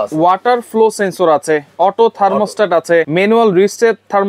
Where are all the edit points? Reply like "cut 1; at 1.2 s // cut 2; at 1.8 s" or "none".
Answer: cut 1; at 3.1 s